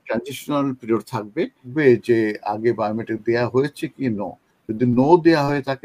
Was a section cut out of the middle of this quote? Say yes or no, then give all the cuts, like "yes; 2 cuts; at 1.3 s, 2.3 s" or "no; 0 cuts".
yes; 1 cut; at 1.7 s